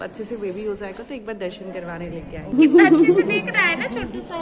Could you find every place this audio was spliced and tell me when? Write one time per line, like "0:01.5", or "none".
0:02.5